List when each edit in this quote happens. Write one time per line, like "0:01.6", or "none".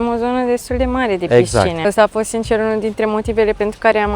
0:01.8